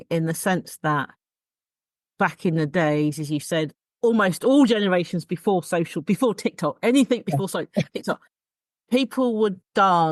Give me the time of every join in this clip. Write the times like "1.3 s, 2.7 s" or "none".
none